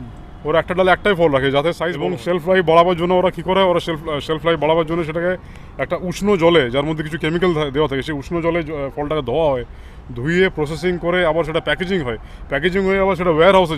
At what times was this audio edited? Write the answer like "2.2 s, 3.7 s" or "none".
1.9 s